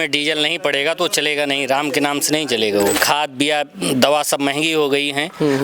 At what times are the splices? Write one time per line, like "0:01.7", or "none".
0:03.0